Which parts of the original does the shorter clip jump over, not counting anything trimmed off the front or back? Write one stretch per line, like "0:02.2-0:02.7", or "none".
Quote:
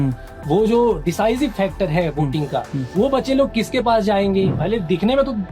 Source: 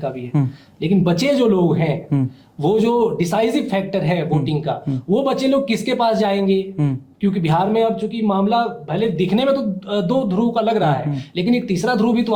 0:06.7-0:08.8